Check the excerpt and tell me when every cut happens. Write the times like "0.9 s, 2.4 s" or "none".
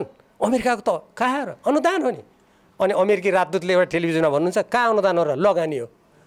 none